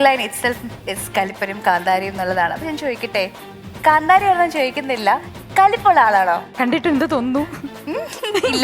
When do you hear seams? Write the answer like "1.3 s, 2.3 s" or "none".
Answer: 6.5 s, 7.8 s